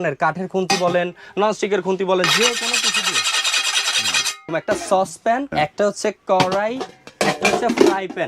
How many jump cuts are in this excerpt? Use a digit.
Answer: 2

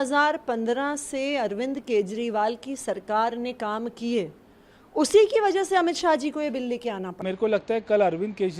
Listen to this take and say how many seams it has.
1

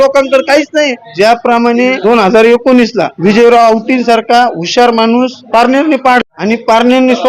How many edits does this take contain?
5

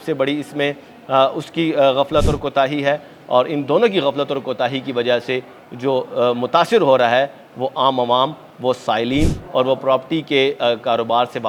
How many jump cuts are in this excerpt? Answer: 0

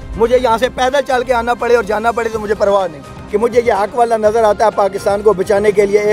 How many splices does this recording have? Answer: 1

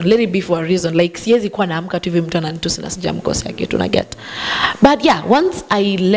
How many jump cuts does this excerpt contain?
0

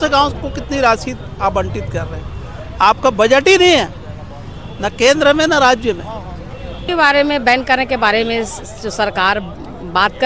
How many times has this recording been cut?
1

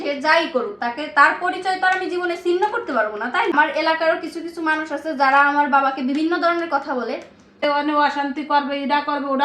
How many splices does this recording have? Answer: 2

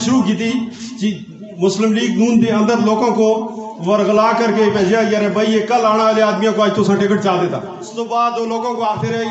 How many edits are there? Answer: 1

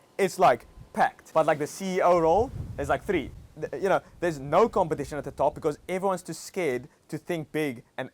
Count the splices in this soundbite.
2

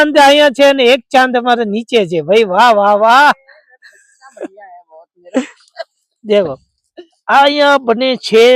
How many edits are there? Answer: 0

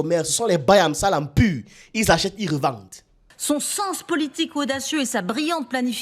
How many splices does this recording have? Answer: 1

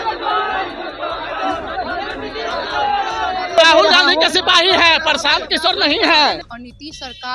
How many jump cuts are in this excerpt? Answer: 2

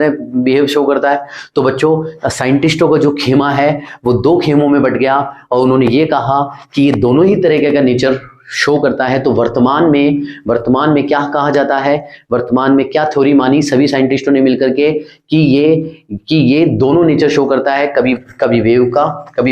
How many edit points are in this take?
0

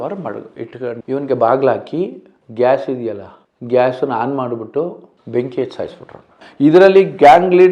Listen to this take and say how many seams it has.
2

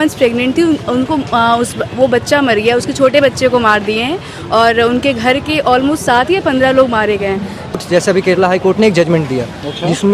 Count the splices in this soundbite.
1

